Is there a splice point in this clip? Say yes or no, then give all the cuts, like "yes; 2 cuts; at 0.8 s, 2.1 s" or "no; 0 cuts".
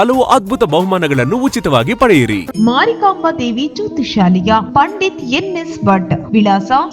yes; 1 cut; at 2.5 s